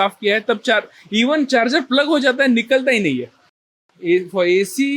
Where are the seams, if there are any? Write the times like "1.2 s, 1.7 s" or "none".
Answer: 3.9 s